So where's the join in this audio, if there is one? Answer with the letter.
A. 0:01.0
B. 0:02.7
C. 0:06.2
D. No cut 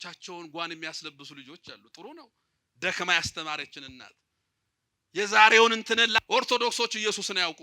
C